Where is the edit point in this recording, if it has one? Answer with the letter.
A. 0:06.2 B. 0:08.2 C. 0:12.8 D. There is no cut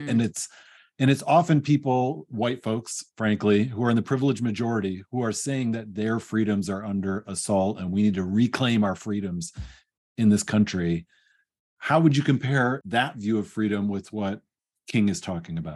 C